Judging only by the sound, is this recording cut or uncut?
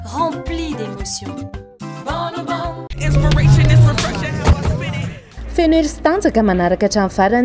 cut